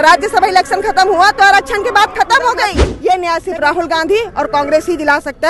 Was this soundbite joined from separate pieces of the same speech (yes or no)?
yes